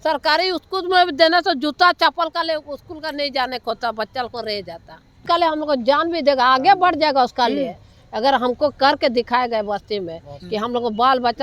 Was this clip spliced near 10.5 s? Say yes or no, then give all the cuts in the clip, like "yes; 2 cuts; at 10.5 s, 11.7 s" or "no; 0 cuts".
no; 1 cut; at 5.2 s